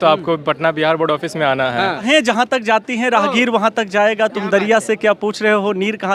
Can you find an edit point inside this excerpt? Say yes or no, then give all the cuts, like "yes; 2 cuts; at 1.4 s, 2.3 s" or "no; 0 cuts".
yes; 1 cut; at 2.1 s